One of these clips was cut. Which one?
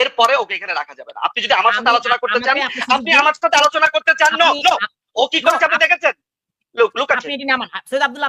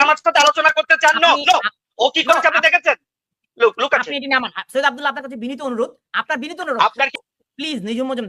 second; 1 cut; at 7.1 s

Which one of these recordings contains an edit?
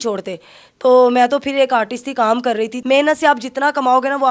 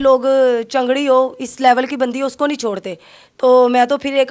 first; 1 cut; at 2.8 s

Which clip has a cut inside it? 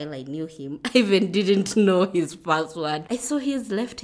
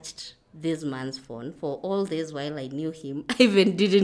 first; 1 cut; at 3.0 s

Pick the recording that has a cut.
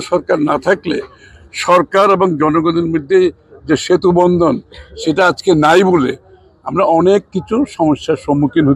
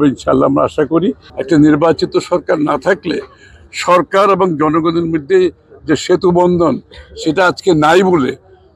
second; 1 cut; at 1.3 s

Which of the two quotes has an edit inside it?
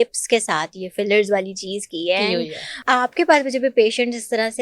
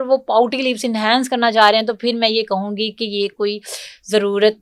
first; 1 cut; at 2.7 s

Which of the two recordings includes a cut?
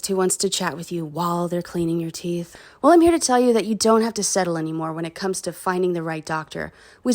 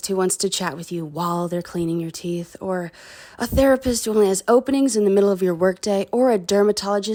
first; 1 cut; at 2.5 s

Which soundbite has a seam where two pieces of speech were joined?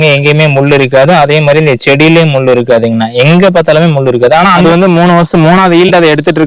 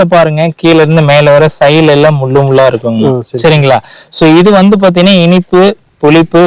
first; 1 cut; at 4.6 s

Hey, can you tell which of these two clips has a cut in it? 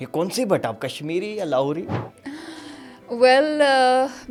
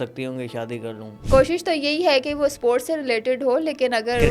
second; 1 cut; at 1.1 s

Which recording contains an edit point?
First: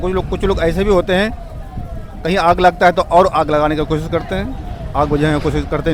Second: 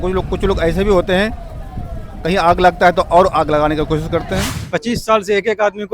second; 1 cut; at 4.5 s

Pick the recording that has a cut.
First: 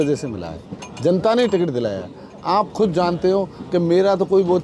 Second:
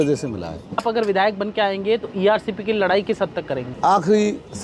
second; 2 cuts; at 0.8 s, 3.7 s

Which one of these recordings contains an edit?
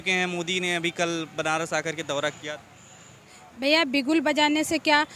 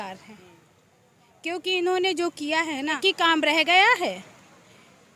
second; 1 cut; at 3.0 s

